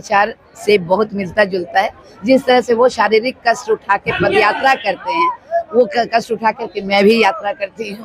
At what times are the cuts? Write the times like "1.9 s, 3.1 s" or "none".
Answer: none